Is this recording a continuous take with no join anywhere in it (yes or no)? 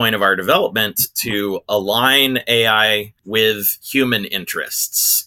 no